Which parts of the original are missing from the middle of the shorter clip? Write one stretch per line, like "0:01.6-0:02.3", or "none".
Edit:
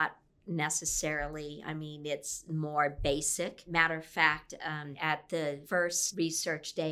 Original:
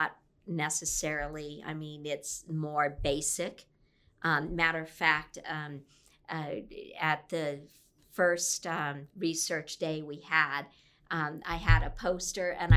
0:03.7-0:04.5
0:05.8-0:06.9
0:08.0-0:09.0